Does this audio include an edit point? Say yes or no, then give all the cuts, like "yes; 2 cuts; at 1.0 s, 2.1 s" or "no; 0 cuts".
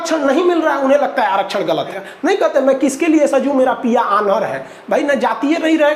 yes; 1 cut; at 2.0 s